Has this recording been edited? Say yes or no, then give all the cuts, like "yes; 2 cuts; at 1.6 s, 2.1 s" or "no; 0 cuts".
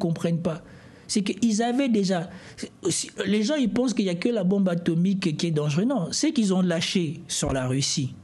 no; 0 cuts